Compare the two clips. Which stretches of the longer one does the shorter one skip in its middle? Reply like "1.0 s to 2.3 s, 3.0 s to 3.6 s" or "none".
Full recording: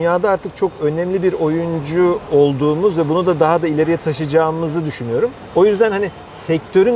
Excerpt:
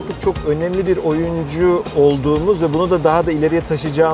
none